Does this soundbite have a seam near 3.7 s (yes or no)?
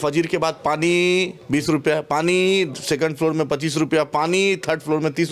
no